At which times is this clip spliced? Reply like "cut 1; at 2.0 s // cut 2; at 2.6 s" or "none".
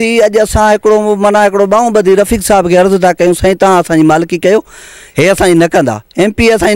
none